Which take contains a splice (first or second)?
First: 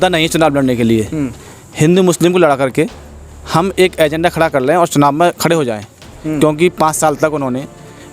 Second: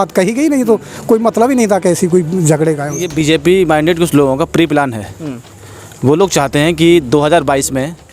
second